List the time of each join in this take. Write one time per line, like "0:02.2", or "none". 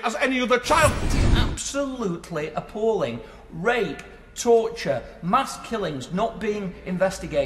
0:01.1